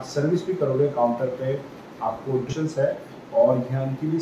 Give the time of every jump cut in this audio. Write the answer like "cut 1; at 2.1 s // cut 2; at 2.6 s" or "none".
cut 1; at 2.5 s